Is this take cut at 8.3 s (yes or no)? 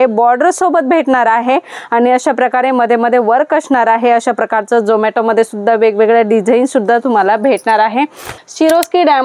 yes